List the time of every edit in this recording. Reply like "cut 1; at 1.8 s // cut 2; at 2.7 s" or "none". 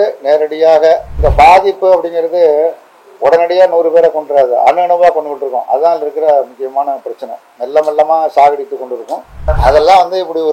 cut 1; at 1.2 s // cut 2; at 9.5 s